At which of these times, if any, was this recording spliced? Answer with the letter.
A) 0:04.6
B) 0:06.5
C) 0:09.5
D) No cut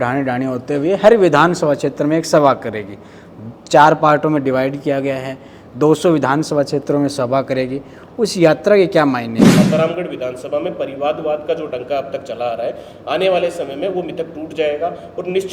C